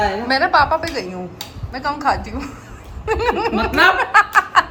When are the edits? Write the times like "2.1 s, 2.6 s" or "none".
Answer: none